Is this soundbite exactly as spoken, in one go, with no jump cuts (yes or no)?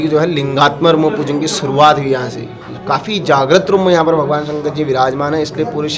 yes